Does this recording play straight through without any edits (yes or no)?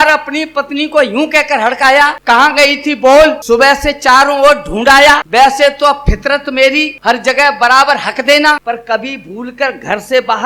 no